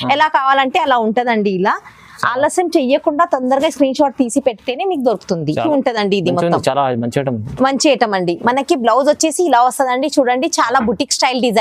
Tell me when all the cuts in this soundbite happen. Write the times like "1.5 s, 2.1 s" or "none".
5.7 s